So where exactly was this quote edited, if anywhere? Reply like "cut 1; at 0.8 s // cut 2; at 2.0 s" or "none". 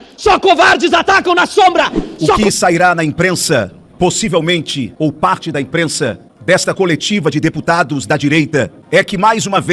cut 1; at 2.4 s // cut 2; at 4.8 s // cut 3; at 6.3 s // cut 4; at 8.8 s